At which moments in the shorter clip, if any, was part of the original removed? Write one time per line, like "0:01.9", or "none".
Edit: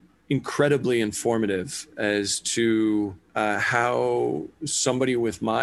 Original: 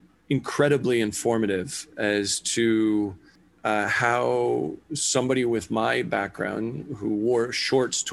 0:03.2